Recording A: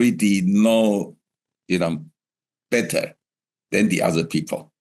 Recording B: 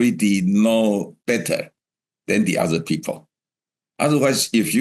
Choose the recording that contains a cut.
B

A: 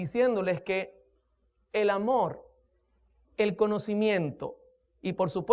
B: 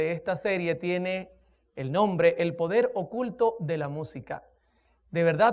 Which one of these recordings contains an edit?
A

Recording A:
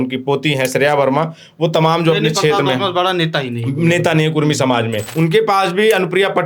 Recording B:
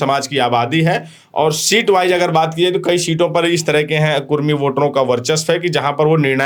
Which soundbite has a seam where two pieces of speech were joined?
A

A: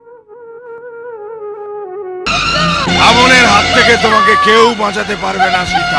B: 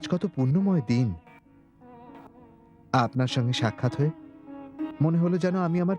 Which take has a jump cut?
A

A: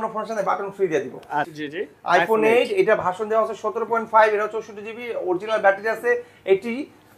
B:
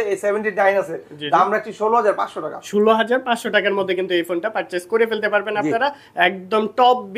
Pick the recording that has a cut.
A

